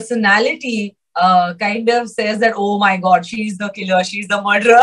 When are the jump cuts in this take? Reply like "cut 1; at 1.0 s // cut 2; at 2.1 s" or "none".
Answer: none